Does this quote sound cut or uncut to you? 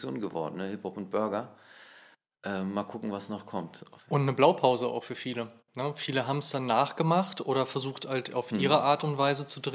uncut